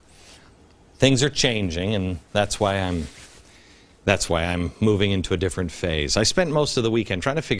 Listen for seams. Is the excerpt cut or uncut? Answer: uncut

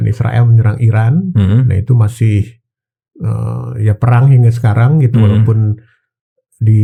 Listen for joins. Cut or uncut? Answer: uncut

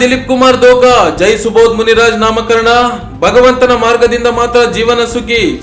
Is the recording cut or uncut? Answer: uncut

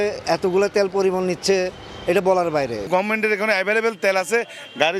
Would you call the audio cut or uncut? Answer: uncut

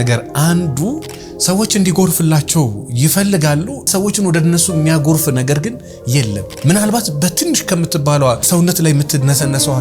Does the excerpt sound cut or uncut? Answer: cut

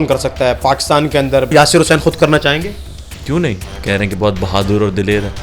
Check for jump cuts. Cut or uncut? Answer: cut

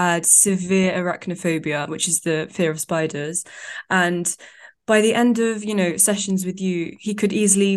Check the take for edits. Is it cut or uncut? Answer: uncut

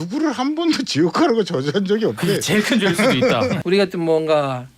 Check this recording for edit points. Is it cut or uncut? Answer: cut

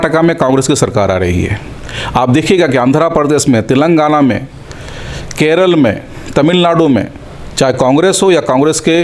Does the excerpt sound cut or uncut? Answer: uncut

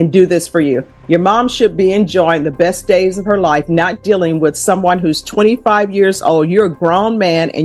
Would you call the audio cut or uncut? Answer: uncut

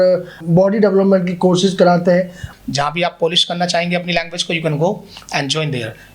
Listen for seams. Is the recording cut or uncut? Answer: cut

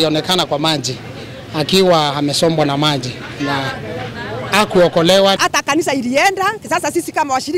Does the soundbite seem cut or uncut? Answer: uncut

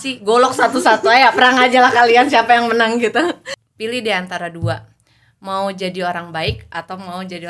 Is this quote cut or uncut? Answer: cut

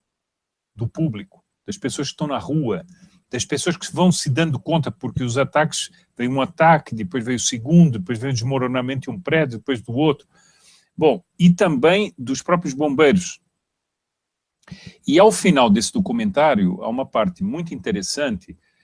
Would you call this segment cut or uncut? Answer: uncut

